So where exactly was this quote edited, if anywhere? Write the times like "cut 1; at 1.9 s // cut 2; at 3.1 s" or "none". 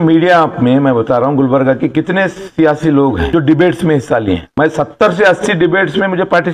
cut 1; at 3.2 s // cut 2; at 4.5 s